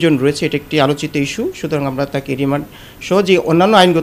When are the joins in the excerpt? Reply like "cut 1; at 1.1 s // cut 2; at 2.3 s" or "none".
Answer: none